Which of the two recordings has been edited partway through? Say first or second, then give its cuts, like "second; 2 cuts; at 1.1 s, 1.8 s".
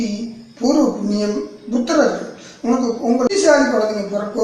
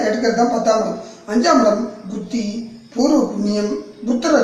first; 1 cut; at 3.3 s